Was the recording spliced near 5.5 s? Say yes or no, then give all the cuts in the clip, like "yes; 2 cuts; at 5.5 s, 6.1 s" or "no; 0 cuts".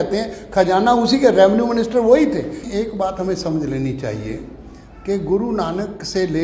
no; 1 cut; at 2.5 s